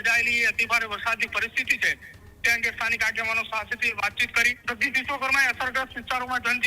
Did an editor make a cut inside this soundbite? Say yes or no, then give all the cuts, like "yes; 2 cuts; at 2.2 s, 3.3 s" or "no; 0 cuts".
yes; 1 cut; at 4.6 s